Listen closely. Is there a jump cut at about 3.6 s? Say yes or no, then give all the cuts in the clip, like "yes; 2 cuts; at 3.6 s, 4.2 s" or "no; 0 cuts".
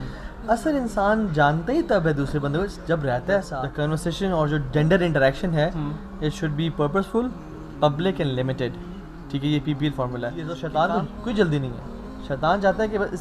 yes; 2 cuts; at 3.6 s, 10.5 s